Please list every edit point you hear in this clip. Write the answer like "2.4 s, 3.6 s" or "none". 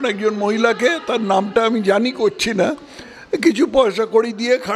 none